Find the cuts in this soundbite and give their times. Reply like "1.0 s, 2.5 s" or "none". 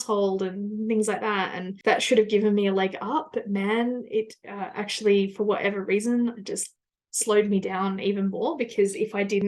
none